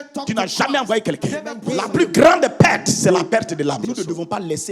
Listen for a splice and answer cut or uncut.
cut